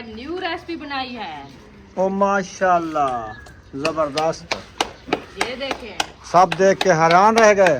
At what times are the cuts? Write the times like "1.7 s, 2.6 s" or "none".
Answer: none